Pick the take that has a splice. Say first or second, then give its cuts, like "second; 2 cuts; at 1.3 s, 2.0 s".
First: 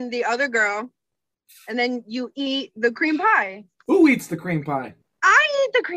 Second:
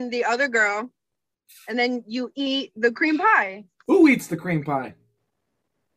first; 1 cut; at 5.0 s